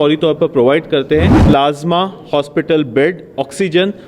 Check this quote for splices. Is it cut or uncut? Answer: cut